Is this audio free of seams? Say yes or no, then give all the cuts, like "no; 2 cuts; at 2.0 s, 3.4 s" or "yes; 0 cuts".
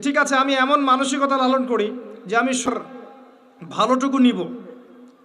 no; 1 cut; at 2.7 s